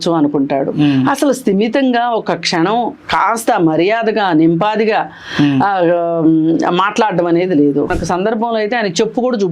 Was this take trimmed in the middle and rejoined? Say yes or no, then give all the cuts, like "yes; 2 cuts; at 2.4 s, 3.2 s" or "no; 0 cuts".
yes; 1 cut; at 7.9 s